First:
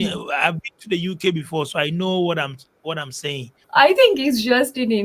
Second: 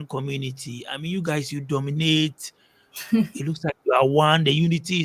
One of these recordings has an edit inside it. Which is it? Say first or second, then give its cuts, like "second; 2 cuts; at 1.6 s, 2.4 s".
first; 1 cut; at 3.6 s